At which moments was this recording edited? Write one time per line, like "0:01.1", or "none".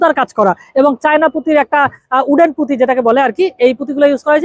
none